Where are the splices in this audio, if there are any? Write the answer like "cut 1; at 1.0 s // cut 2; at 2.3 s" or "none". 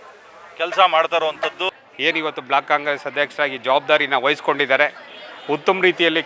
cut 1; at 1.7 s